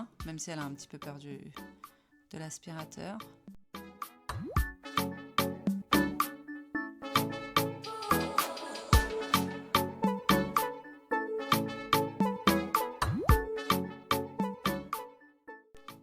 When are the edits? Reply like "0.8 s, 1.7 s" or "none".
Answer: none